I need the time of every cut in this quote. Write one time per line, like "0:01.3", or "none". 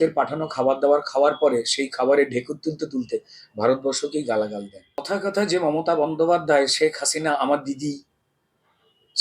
0:05.1